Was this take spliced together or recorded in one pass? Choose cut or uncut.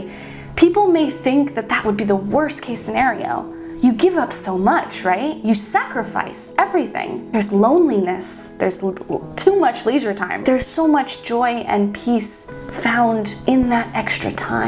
cut